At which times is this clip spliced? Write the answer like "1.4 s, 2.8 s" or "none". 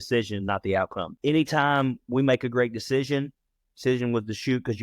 1.1 s